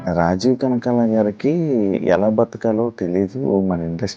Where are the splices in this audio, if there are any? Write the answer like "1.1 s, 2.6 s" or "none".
none